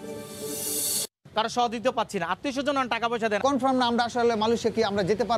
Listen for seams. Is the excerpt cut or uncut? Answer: cut